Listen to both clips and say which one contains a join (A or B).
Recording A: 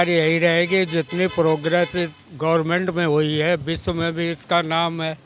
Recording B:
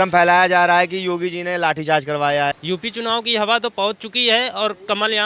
B